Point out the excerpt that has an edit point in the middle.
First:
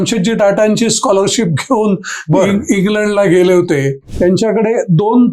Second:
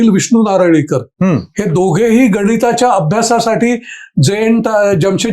first; 1 cut; at 4.0 s

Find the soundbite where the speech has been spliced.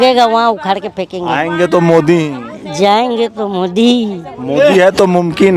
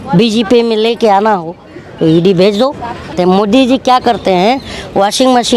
second; 1 cut; at 3.1 s

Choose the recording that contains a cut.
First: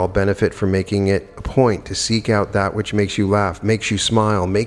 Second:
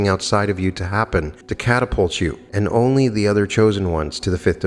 second; 2 cuts; at 1.4 s, 2.4 s

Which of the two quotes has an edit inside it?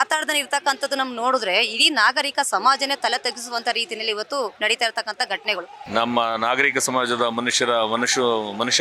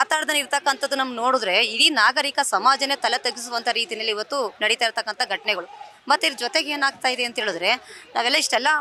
first; 1 cut; at 5.7 s

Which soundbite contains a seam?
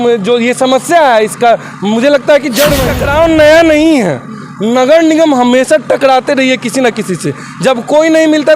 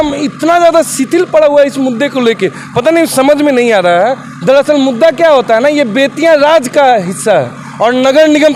first; 1 cut; at 2.9 s

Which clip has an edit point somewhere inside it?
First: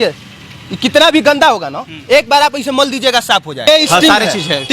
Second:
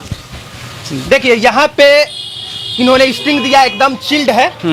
first; 1 cut; at 3.7 s

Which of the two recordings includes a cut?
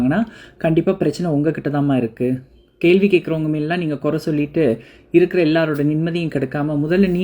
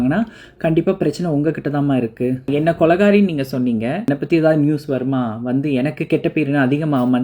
second; 2 cuts; at 2.5 s, 4.1 s

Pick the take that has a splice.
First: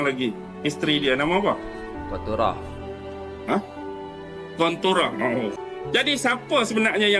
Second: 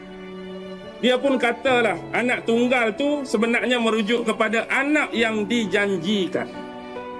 first; 1 cut; at 5.6 s

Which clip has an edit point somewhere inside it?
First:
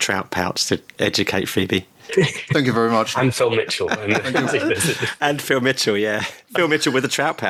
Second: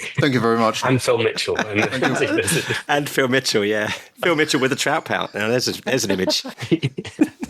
second; 1 cut; at 6.5 s

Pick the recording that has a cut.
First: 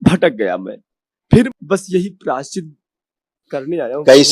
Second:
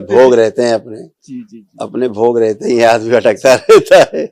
first; 1 cut; at 1.5 s

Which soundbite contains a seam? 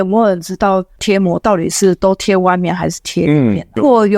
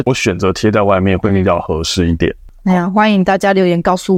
first; 1 cut; at 1.0 s

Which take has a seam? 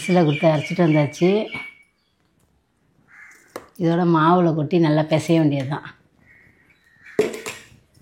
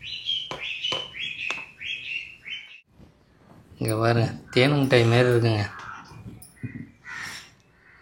second; 1 cut; at 2.8 s

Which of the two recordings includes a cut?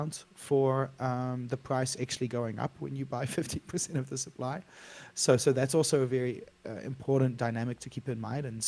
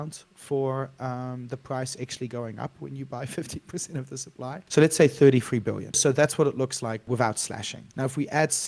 second; 4 cuts; at 4.6 s, 6.0 s, 7.0 s, 7.8 s

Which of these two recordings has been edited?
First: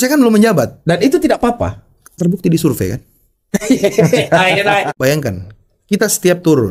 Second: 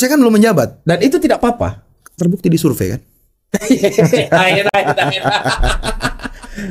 first; 1 cut; at 4.9 s

